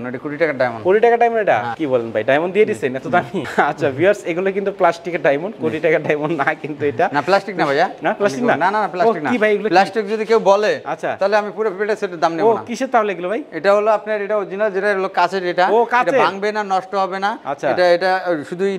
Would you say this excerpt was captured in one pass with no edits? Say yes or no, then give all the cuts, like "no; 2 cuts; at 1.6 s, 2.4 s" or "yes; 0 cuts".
yes; 0 cuts